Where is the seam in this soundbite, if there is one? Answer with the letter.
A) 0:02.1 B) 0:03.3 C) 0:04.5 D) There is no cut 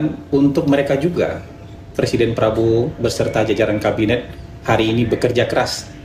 D